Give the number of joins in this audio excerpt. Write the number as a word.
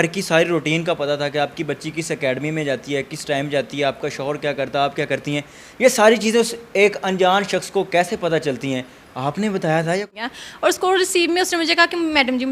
one